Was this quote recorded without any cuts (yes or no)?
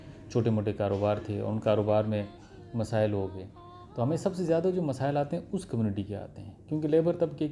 yes